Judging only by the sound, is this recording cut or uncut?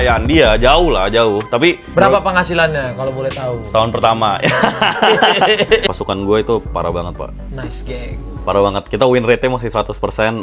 cut